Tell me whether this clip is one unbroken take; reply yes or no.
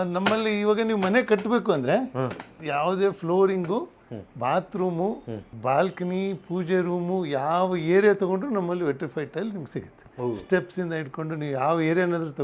no